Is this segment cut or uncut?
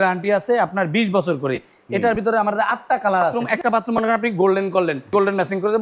cut